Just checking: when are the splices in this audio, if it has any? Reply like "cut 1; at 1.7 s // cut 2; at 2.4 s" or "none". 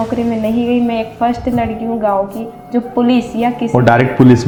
none